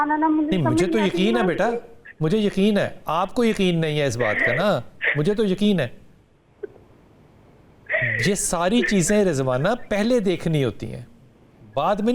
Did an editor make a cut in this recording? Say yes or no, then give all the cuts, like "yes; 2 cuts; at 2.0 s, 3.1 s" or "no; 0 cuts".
no; 0 cuts